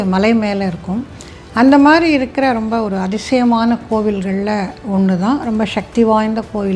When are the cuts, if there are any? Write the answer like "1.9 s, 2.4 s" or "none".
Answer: none